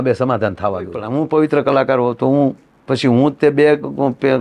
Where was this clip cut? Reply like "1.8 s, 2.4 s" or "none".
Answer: 1.0 s